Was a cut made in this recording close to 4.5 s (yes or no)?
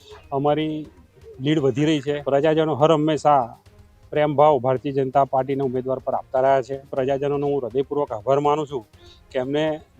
no